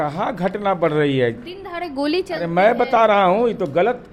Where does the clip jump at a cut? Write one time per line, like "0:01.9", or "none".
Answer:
none

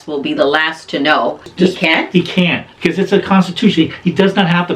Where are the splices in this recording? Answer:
0:01.5

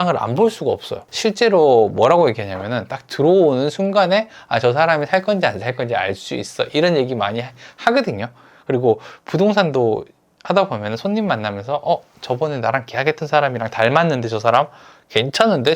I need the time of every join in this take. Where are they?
0:01.0

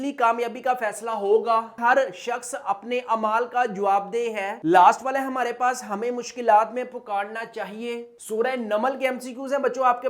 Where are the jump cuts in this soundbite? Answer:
0:01.7
0:08.2

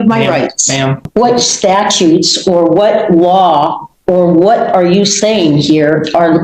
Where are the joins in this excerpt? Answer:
0:01.0

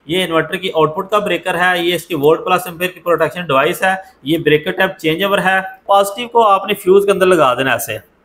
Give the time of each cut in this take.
0:05.8

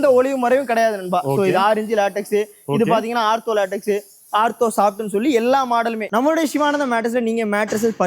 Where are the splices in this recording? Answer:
0:06.0

